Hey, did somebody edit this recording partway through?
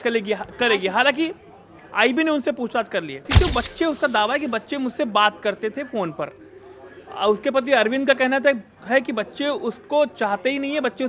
yes; 1 cut; at 3.3 s

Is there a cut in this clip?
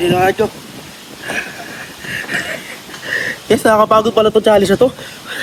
no; 0 cuts

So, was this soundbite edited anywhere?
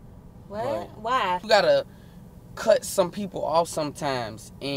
yes; 1 cut; at 1.4 s

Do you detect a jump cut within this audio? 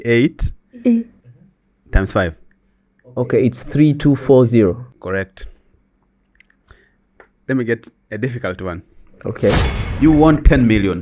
yes; 2 cuts; at 4.9 s, 9.8 s

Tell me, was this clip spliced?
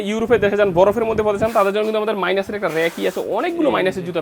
no; 0 cuts

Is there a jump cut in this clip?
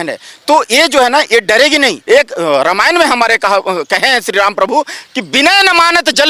no; 0 cuts

